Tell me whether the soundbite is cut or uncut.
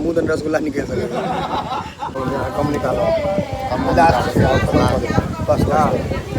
cut